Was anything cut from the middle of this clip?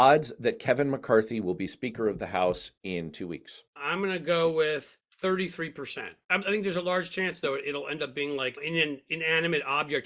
no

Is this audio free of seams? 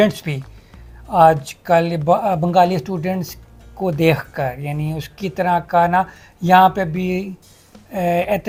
yes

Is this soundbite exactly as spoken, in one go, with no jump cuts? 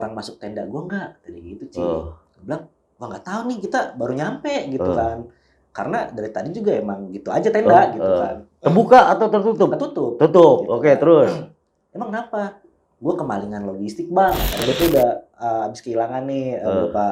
no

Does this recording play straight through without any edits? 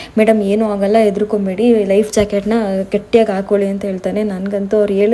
yes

